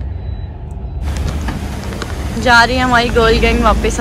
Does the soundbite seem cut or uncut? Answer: cut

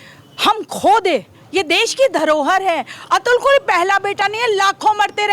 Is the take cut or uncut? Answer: uncut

